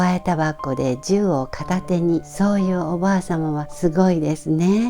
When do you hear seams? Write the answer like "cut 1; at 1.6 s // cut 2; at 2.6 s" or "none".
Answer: cut 1; at 2.3 s // cut 2; at 3.7 s